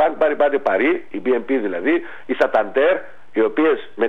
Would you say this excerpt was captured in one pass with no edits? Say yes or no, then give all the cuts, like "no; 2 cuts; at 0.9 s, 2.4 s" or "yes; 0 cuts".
no; 2 cuts; at 1.1 s, 3.2 s